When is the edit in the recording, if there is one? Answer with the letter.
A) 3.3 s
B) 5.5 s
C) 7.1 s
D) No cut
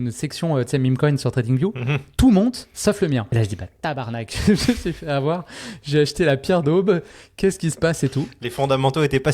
A